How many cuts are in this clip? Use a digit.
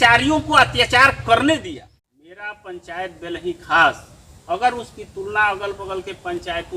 1